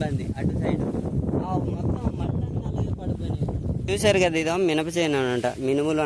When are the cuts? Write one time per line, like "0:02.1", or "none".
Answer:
0:04.0